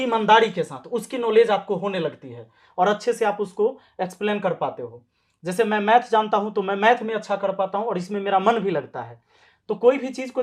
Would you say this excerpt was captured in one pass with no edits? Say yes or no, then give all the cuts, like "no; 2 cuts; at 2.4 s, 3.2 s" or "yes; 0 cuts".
yes; 0 cuts